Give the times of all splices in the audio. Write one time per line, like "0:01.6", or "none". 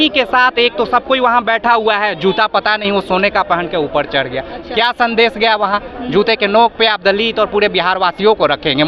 none